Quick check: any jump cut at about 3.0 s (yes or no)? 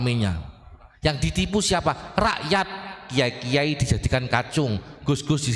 no